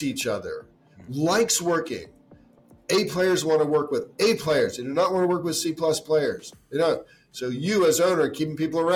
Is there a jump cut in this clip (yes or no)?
no